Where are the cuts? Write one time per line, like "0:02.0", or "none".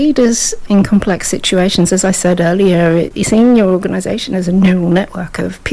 0:03.1